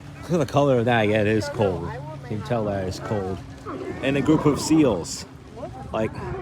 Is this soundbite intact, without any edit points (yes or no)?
yes